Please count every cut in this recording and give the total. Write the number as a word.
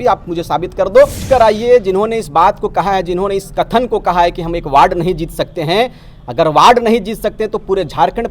one